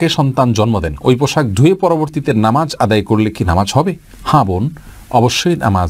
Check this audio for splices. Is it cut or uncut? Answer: uncut